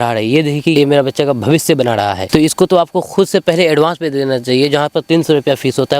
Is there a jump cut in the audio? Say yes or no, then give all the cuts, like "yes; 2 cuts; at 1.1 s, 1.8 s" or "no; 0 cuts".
yes; 2 cuts; at 0.7 s, 2.2 s